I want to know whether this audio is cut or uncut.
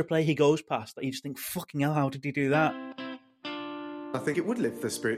cut